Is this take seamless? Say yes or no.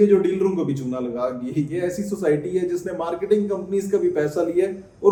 yes